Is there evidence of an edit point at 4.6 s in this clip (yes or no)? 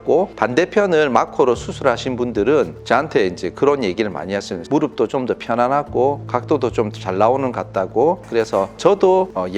yes